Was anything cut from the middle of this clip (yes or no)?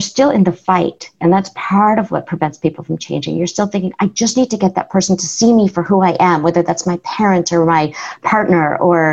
yes